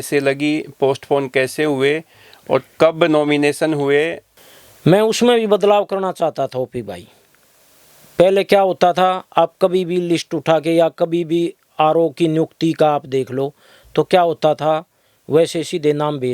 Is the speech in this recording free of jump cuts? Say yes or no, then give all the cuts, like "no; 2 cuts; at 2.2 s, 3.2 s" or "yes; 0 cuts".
no; 1 cut; at 4.3 s